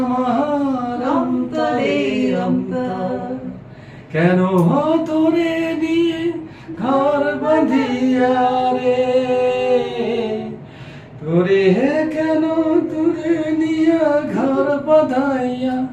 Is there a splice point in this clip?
no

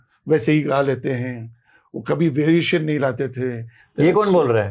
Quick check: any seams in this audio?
yes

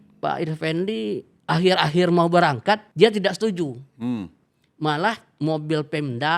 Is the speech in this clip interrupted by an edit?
yes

